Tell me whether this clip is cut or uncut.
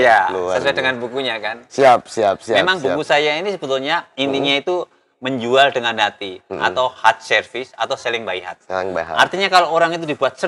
uncut